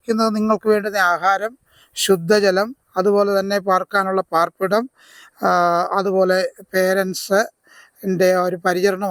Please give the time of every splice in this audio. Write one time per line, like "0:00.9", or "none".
none

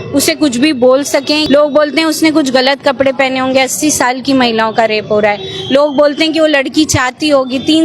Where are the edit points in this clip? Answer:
0:01.4

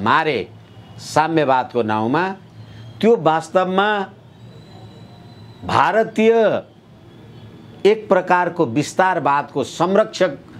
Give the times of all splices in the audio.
none

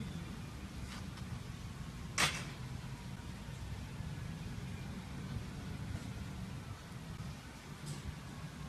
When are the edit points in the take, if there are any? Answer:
none

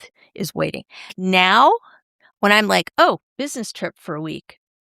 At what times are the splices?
0:01.1

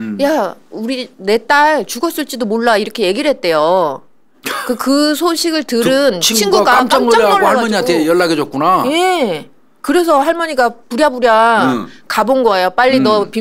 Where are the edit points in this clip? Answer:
none

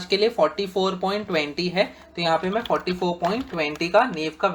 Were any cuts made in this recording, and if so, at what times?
none

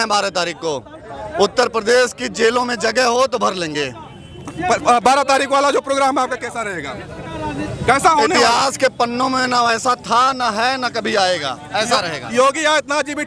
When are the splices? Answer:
none

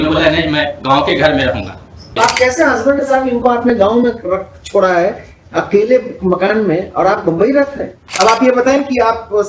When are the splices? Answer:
0:02.1
0:08.0

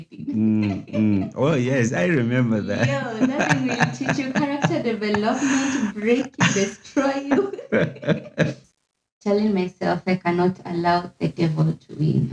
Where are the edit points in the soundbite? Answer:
0:08.6

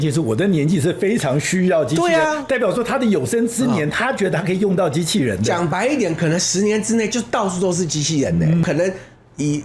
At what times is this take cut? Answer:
0:08.6

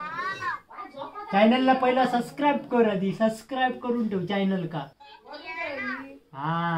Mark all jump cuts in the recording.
0:05.0

